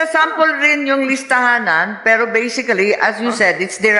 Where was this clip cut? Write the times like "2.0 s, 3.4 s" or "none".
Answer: none